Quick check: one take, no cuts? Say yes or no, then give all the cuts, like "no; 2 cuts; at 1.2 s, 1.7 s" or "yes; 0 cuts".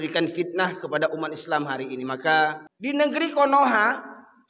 no; 1 cut; at 2.7 s